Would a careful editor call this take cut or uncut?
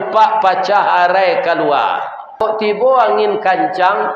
cut